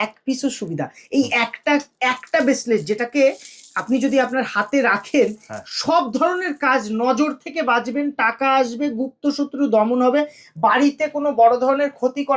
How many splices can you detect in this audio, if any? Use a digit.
0